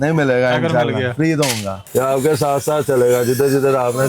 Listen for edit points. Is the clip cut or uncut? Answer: cut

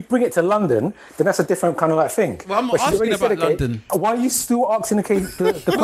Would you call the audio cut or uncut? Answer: cut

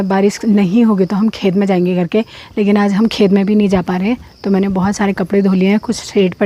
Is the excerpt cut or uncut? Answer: uncut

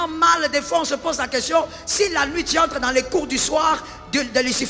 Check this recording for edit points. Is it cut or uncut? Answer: uncut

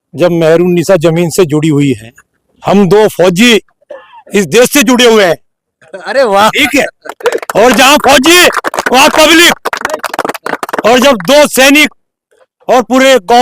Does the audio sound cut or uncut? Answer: uncut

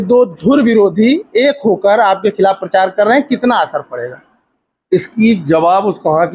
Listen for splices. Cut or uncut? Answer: uncut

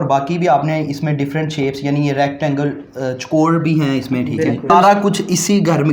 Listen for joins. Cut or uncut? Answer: cut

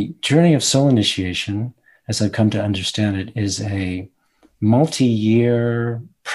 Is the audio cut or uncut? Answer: uncut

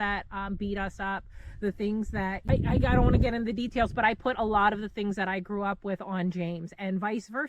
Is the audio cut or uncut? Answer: cut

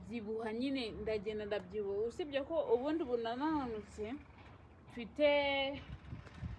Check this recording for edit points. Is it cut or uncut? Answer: uncut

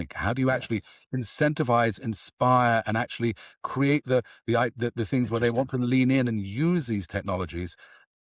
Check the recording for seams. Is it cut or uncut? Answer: uncut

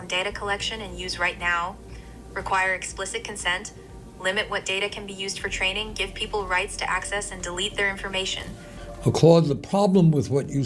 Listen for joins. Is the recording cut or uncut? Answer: cut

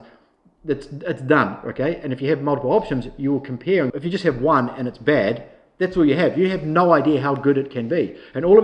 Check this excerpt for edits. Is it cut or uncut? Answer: cut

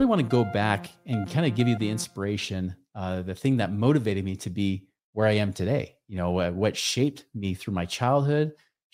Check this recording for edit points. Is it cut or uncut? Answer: uncut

